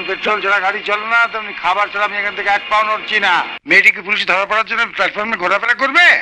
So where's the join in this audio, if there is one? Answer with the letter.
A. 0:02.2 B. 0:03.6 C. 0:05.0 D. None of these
B